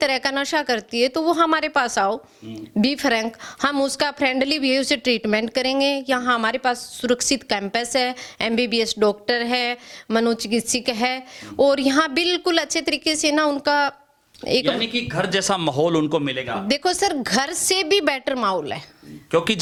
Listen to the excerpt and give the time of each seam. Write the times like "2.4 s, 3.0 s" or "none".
none